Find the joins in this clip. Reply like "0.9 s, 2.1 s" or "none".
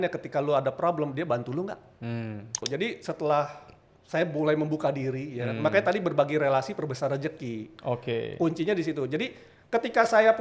2.7 s